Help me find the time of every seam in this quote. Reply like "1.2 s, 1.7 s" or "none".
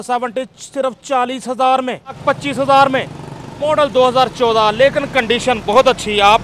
2.2 s